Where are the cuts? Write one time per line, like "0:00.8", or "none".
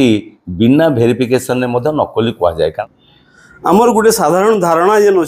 0:02.8